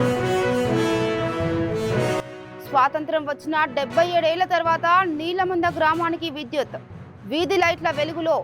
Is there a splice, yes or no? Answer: yes